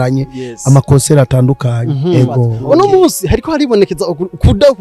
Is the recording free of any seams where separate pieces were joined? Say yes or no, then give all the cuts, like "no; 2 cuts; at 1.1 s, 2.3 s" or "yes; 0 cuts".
no; 1 cut; at 2.6 s